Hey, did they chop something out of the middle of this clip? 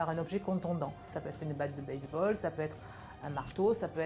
yes; 1 cut; at 1.2 s

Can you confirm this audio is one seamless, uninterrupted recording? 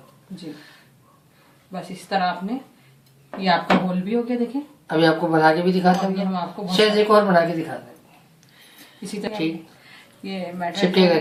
yes; 0 cuts

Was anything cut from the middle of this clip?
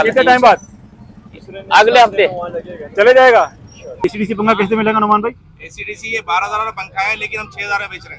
yes; 1 cut; at 4.1 s

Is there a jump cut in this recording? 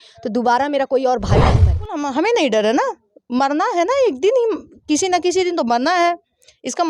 yes; 1 cut; at 1.7 s

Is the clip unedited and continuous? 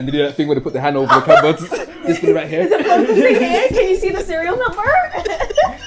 yes; 0 cuts

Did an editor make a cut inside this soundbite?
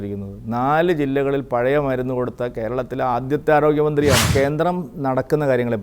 yes; 1 cut; at 4.3 s

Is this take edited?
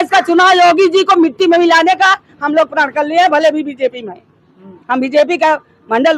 no; 0 cuts

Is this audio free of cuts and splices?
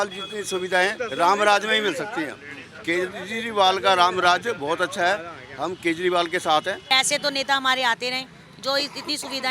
no; 1 cut; at 6.9 s

